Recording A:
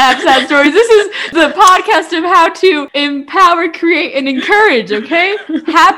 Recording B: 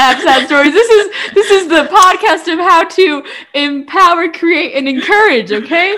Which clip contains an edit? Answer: A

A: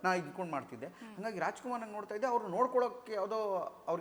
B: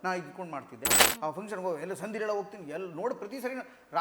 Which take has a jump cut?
B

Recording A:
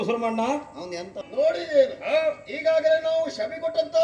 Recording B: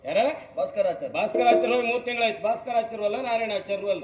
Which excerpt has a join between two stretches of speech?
A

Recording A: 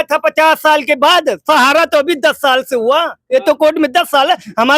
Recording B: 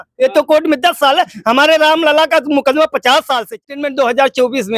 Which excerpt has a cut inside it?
B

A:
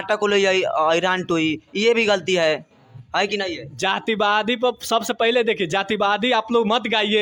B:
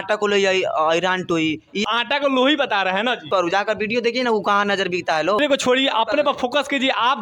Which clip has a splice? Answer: B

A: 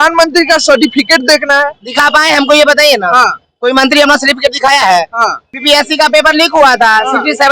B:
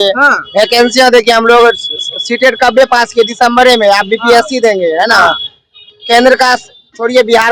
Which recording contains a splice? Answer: A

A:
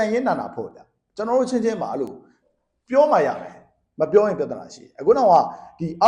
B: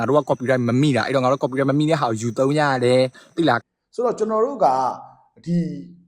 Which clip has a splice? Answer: B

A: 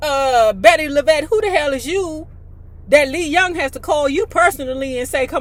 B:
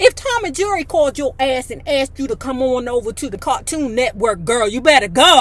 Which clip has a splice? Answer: B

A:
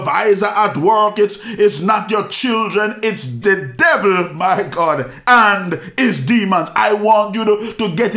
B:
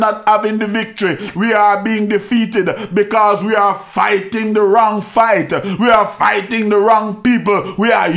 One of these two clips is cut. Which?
A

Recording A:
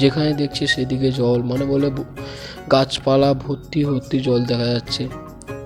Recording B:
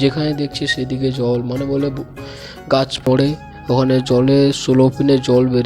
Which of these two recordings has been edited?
B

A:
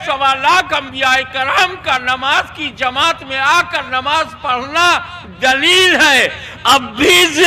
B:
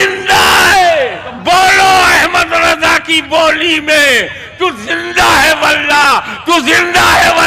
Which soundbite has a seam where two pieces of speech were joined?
B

